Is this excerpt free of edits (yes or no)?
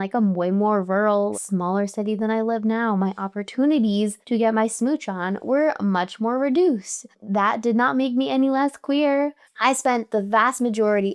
no